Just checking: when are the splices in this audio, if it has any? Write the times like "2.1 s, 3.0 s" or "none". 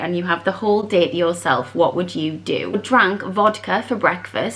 2.7 s